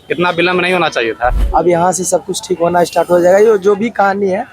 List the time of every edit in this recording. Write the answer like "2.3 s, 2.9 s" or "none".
1.4 s